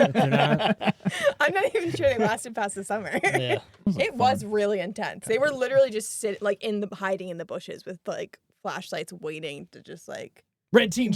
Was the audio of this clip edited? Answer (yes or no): yes